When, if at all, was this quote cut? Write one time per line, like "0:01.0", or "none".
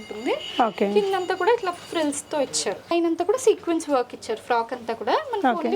0:02.9